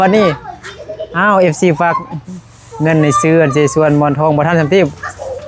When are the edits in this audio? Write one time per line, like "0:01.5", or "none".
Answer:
none